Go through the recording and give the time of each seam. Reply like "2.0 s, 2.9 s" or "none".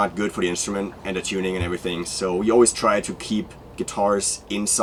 none